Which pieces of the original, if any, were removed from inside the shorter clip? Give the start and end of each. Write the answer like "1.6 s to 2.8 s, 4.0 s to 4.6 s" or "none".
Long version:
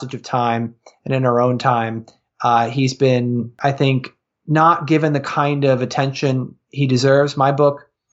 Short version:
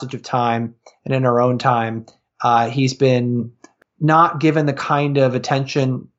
3.5 s to 4.0 s